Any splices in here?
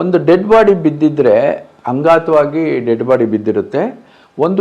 no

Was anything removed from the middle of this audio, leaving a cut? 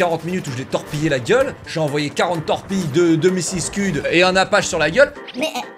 no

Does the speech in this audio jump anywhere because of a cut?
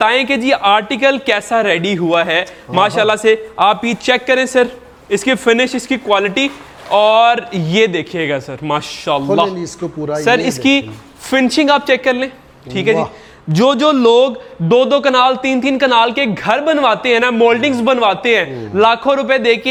no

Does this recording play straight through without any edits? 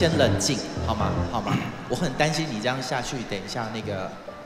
yes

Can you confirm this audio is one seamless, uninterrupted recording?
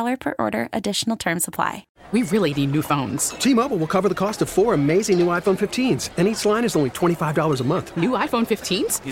no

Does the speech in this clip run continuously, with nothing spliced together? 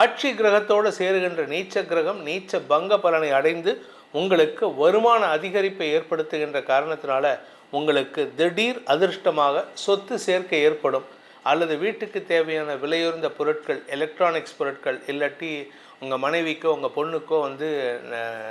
yes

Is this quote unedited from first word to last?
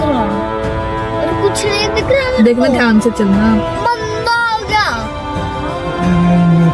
yes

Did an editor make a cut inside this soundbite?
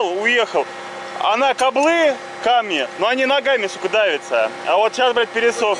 no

